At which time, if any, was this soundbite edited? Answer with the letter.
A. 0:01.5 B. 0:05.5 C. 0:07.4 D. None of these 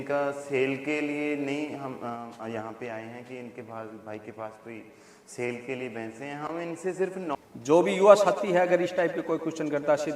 C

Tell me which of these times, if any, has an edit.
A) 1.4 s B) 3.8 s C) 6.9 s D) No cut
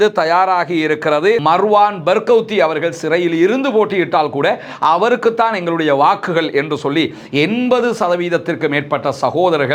A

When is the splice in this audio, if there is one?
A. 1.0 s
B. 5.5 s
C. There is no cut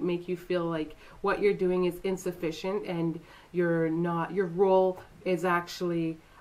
C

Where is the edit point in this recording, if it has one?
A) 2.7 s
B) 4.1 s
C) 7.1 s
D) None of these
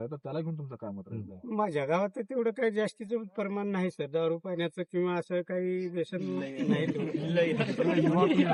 D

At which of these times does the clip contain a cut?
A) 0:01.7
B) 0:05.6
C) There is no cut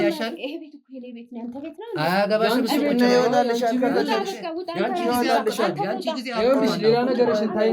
C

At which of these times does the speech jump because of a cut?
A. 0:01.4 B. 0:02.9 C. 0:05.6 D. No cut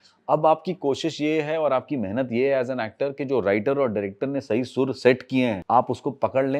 C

